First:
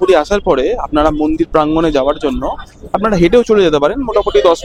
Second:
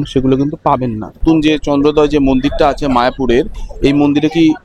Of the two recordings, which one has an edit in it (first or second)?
second